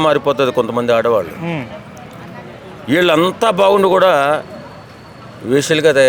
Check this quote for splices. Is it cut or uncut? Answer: uncut